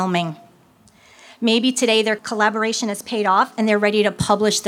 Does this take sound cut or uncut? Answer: cut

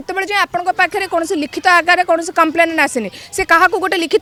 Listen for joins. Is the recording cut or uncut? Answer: uncut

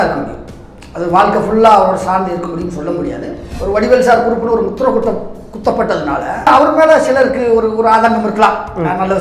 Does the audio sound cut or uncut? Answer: cut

